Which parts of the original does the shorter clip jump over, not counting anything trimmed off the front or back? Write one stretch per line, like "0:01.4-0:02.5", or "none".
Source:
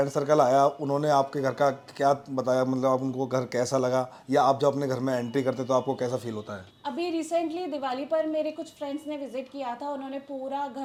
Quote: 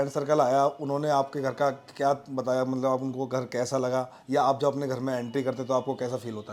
none